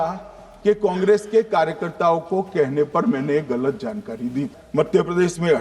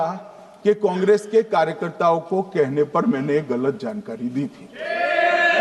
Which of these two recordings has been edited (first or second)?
first